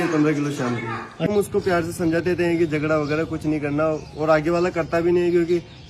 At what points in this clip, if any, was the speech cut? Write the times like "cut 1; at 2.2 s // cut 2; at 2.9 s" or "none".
cut 1; at 1.3 s